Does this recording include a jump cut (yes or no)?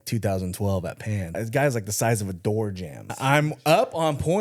yes